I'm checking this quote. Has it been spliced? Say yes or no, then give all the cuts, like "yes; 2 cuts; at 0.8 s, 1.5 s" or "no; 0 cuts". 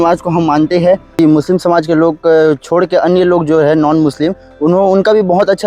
yes; 1 cut; at 1.2 s